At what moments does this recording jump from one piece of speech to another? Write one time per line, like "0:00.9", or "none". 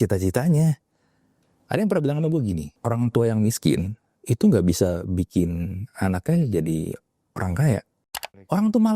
0:08.0